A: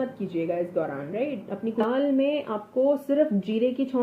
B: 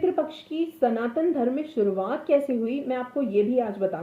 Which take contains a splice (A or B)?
A